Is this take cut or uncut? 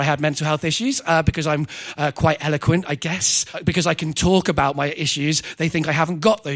cut